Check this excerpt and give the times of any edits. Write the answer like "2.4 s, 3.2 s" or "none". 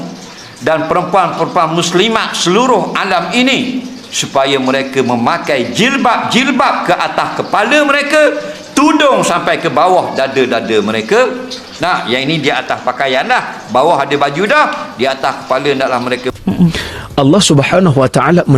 16.3 s